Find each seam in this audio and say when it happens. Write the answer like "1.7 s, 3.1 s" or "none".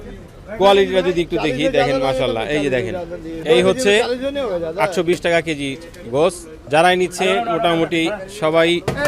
3.4 s, 6.5 s

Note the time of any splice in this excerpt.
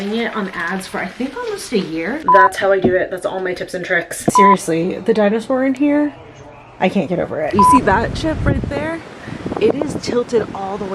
2.2 s, 4.3 s, 7.5 s

